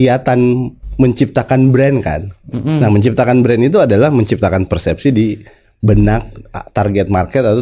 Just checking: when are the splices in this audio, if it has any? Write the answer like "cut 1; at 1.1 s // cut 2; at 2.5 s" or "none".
none